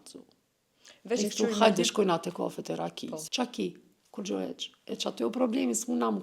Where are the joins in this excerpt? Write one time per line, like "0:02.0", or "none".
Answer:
0:03.2